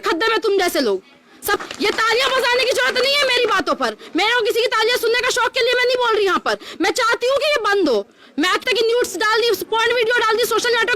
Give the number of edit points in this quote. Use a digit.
2